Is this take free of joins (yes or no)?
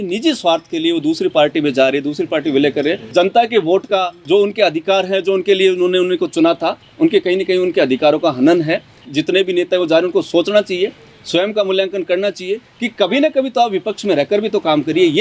no